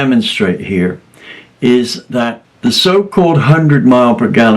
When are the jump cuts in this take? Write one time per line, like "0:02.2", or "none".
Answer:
0:02.4